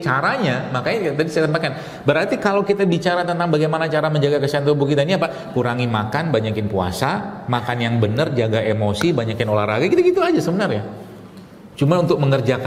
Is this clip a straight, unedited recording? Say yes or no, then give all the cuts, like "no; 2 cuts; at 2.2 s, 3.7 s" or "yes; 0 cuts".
yes; 0 cuts